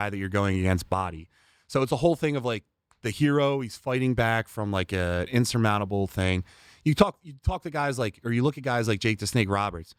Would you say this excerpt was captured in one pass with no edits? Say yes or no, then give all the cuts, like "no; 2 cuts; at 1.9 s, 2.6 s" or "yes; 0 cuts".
yes; 0 cuts